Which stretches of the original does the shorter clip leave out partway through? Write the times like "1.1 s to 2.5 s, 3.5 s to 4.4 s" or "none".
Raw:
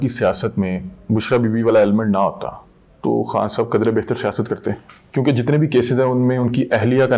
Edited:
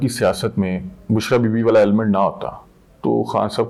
none